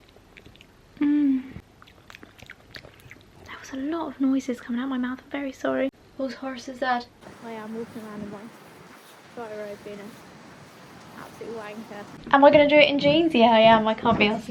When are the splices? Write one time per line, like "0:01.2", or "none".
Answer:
0:01.6
0:06.0
0:07.2
0:12.1

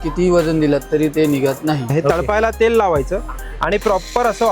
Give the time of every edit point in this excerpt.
0:01.9

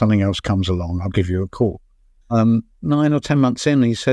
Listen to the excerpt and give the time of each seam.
0:02.2

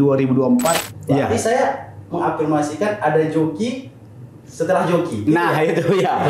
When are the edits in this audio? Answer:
0:00.9

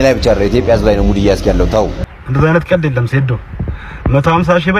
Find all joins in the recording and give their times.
0:02.0

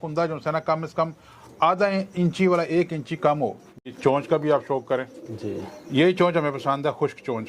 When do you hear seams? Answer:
0:03.9

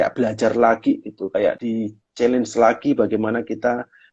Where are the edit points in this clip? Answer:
0:01.6

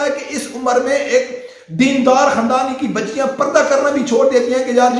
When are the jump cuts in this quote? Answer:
none

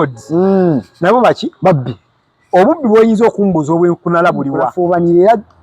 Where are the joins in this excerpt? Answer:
0:04.7

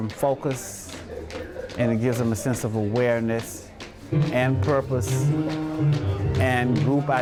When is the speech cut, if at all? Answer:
none

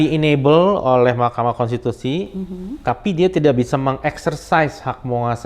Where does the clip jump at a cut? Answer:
none

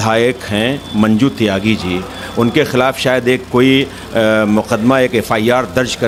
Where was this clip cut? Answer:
none

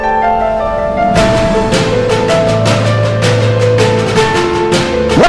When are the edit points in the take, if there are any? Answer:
none

